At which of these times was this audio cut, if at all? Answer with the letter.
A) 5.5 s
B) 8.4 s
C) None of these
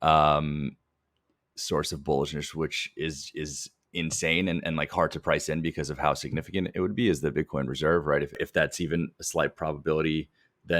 B